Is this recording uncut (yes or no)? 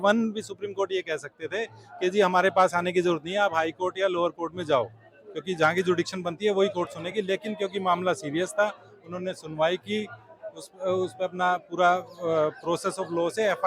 yes